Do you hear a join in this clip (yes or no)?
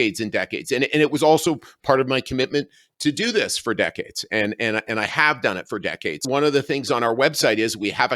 yes